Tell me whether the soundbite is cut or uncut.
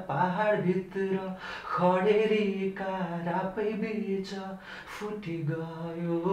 uncut